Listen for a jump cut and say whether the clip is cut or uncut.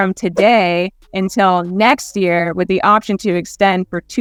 uncut